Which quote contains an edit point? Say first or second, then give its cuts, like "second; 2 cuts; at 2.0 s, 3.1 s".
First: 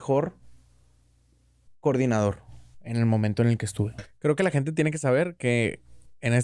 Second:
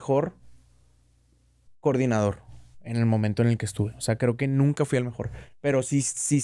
first; 1 cut; at 4.0 s